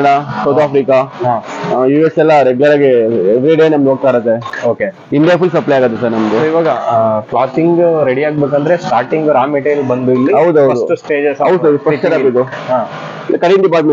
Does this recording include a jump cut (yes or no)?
no